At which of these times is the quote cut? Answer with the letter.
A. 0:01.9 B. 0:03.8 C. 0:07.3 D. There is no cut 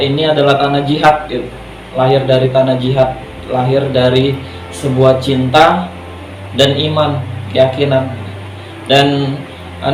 D